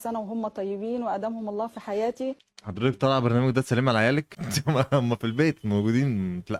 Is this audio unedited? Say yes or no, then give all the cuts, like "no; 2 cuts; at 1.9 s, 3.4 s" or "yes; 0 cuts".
yes; 0 cuts